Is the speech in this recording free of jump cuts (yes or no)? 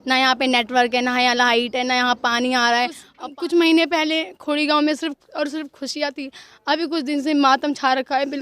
no